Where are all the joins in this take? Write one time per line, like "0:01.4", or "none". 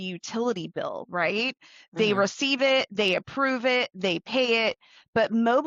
none